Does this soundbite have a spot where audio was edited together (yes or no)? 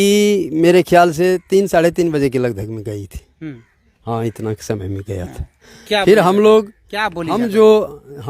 no